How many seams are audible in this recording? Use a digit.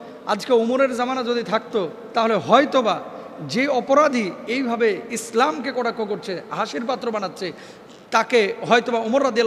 0